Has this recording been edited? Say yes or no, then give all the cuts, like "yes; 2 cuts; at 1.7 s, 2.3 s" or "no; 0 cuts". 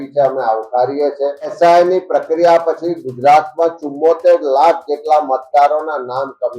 yes; 1 cut; at 1.5 s